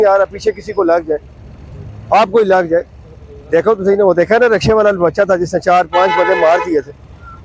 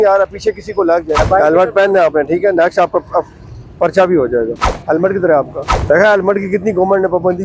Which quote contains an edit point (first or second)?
second